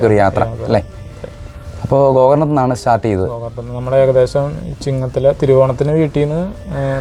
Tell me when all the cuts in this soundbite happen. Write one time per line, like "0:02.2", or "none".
none